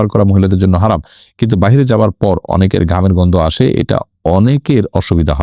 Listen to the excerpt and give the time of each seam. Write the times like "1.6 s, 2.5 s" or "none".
none